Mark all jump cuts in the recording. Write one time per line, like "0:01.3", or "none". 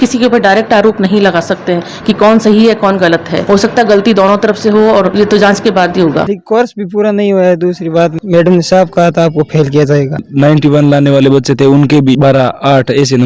0:06.2
0:10.2